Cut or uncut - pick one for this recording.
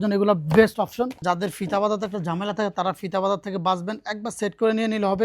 cut